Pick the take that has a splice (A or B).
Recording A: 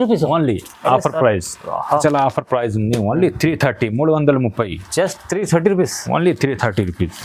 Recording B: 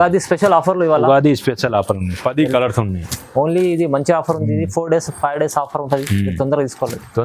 A